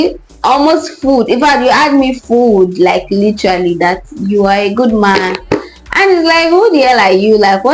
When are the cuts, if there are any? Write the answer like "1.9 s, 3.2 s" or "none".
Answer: 5.4 s